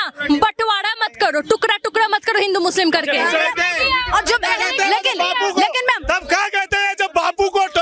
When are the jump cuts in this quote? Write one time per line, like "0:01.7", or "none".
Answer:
none